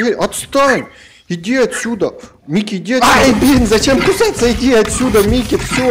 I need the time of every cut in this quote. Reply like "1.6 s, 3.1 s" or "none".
3.0 s